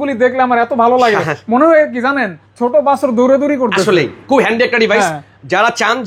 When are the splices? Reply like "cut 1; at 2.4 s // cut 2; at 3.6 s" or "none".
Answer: none